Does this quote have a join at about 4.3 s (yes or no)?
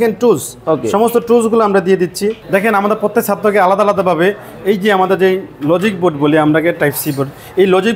no